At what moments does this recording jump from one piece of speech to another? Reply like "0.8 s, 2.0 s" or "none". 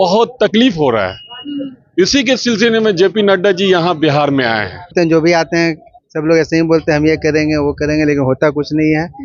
4.9 s